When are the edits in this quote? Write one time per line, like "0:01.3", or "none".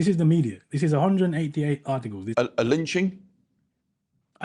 0:02.3